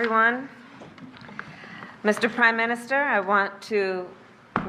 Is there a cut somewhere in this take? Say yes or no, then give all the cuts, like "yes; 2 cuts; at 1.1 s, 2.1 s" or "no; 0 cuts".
no; 0 cuts